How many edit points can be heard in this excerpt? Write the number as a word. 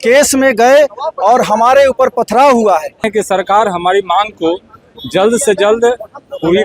one